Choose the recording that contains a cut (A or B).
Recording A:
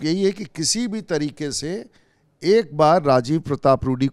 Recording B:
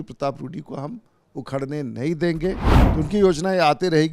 B